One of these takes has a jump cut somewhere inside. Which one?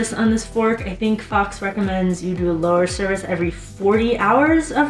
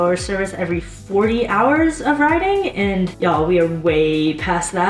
second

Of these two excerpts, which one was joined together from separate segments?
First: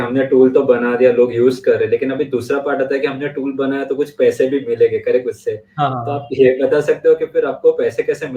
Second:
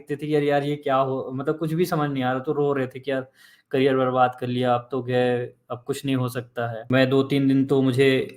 second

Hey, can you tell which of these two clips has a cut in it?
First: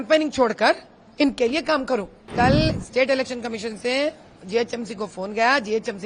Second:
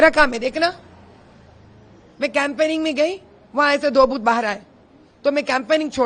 first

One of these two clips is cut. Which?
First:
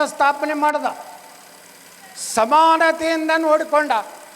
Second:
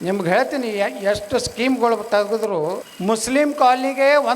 second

